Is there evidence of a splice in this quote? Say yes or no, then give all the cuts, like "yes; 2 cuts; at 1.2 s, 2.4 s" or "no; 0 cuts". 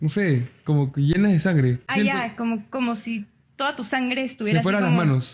yes; 1 cut; at 1.9 s